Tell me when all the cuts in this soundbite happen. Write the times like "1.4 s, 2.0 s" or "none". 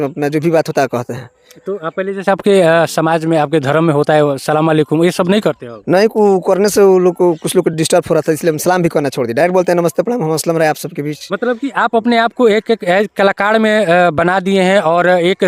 none